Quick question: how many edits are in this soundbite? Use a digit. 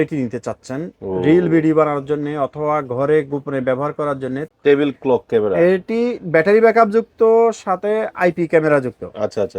1